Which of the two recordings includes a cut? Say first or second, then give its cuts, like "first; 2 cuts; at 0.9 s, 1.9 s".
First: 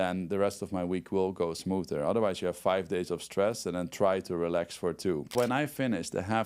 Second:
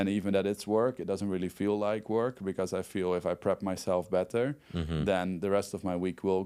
first; 1 cut; at 5.3 s